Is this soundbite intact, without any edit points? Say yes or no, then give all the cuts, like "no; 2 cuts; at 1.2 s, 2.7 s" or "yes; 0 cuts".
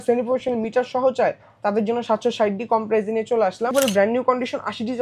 no; 1 cut; at 3.7 s